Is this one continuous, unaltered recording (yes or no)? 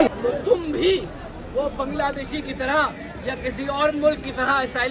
yes